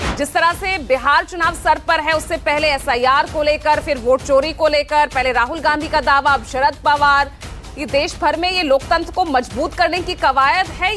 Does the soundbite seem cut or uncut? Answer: uncut